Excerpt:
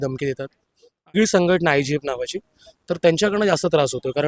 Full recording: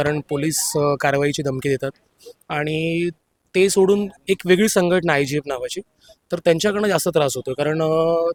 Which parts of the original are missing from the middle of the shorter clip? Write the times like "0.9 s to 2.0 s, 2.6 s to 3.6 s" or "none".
2.6 s to 4.6 s